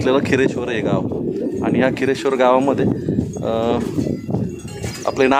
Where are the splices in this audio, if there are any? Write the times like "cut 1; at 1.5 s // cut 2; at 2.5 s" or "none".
none